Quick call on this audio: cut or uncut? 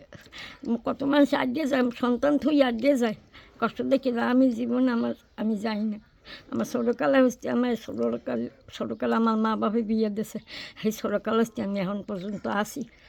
uncut